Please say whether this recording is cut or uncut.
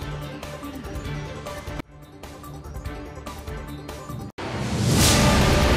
cut